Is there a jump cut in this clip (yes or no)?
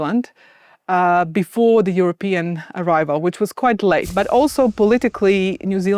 yes